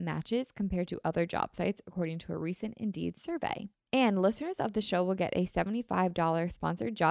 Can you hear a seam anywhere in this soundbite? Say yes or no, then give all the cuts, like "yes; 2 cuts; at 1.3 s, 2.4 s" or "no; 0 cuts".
yes; 1 cut; at 3.7 s